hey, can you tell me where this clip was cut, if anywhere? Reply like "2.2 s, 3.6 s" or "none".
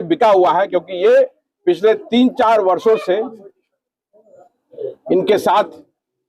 none

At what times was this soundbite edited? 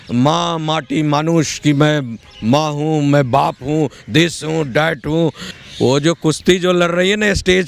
5.5 s

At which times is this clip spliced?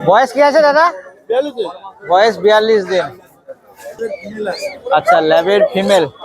3.9 s

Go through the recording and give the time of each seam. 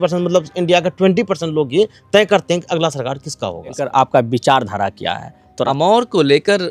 3.9 s, 5.7 s

